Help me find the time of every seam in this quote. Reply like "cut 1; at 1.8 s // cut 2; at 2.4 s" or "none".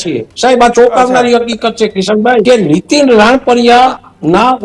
cut 1; at 2.4 s